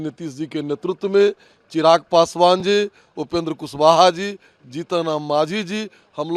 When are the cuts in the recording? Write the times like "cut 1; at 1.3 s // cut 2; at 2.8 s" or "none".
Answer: none